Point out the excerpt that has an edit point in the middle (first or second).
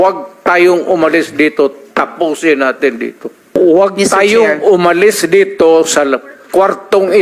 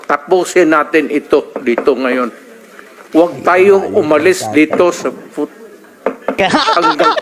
first